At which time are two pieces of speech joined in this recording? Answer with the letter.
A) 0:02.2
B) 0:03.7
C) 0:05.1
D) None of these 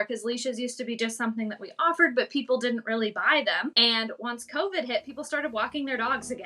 B